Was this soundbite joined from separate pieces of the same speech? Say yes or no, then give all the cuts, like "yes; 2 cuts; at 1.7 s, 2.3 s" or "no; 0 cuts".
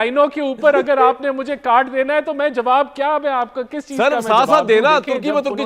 no; 0 cuts